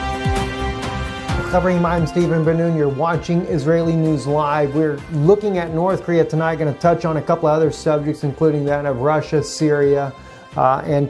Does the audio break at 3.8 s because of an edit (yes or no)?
yes